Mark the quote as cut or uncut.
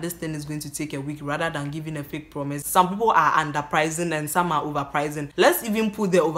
cut